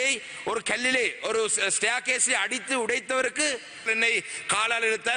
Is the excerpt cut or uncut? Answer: cut